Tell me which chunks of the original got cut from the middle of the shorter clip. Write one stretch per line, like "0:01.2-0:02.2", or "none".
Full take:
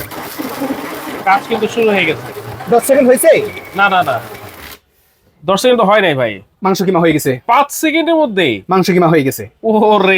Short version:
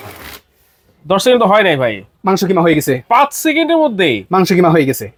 none